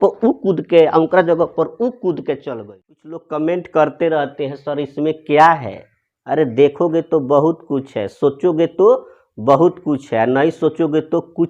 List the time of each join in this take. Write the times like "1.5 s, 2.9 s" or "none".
3.1 s